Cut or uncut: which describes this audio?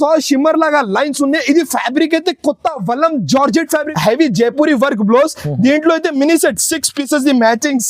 cut